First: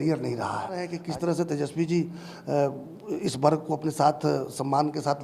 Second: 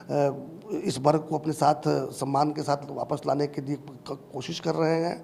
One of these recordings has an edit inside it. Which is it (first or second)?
first